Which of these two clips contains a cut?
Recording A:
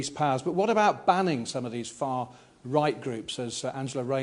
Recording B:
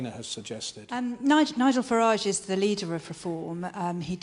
B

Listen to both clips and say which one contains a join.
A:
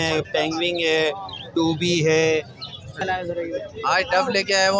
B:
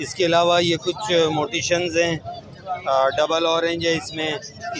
A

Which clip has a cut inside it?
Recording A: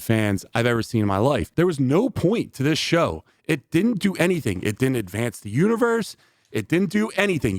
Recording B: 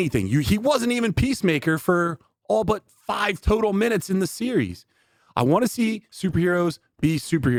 A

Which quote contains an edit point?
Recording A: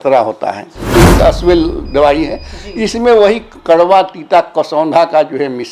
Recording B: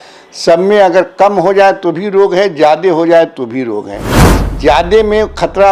A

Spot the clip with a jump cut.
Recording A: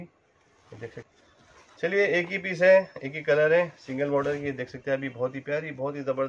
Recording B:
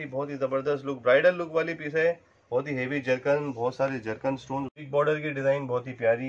B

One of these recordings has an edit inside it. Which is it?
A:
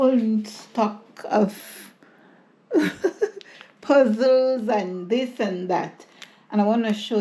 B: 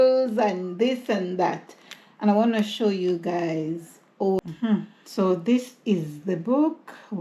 B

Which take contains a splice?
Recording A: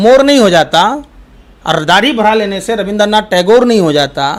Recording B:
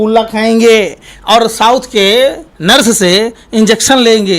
B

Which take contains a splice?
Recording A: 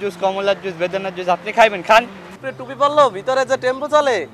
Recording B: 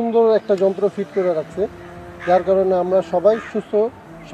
A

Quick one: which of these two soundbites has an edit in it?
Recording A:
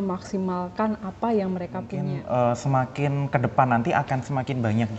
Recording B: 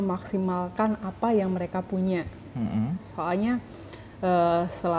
A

